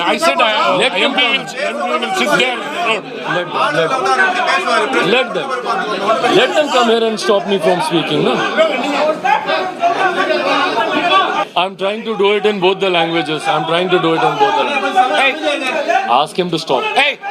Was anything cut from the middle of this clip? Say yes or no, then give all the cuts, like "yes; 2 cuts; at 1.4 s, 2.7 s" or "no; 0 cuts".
yes; 1 cut; at 11.5 s